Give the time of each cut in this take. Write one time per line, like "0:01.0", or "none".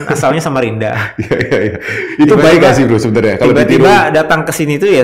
none